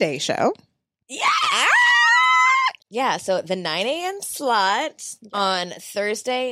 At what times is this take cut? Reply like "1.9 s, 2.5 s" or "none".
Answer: 2.8 s